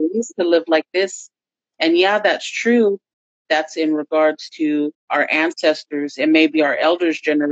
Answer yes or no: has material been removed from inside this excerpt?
yes